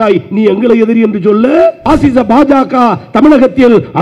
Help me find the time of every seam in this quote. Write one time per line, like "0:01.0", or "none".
0:01.8